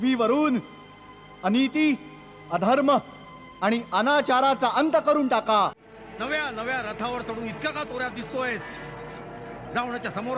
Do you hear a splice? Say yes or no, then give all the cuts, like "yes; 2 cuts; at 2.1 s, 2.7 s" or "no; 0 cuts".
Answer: yes; 1 cut; at 5.9 s